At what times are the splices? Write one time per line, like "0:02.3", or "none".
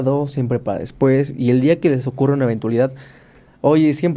none